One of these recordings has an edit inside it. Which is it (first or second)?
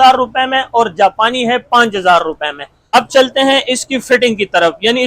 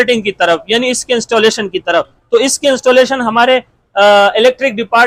first